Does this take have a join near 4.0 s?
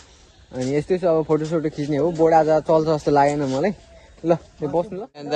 no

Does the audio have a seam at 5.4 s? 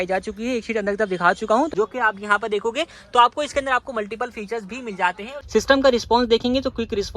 yes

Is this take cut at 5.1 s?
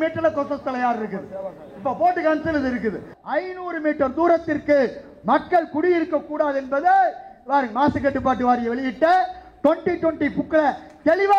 no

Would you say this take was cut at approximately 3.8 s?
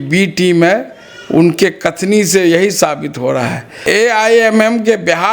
yes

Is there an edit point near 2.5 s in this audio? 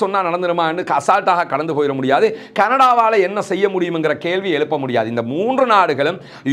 no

